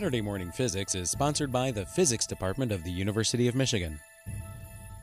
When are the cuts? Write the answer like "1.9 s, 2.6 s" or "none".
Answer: 4.1 s